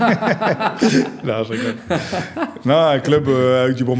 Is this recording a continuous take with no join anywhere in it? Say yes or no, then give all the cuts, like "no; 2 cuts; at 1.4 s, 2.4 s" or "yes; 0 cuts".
yes; 0 cuts